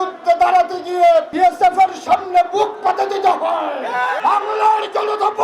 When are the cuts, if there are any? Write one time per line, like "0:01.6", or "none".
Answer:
0:01.3
0:04.2